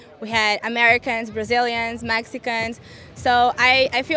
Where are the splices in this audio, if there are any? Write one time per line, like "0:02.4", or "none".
none